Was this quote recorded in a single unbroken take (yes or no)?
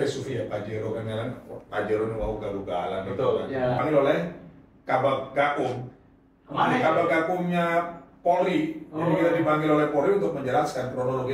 no